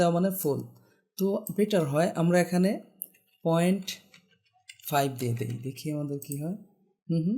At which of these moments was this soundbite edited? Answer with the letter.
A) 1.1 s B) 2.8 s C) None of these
C